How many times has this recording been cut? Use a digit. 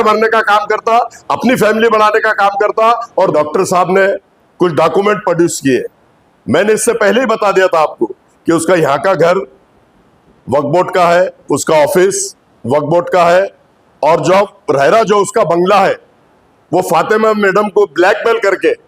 1